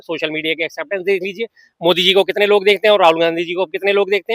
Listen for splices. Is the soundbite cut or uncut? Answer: uncut